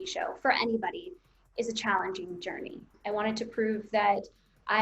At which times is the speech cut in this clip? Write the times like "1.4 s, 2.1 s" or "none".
2.9 s